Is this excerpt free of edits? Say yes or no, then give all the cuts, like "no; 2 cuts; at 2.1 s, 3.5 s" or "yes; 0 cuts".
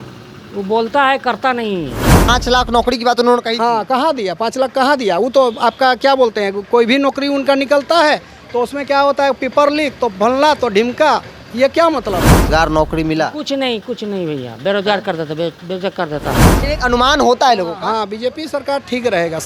no; 3 cuts; at 2.3 s, 12.4 s, 16.6 s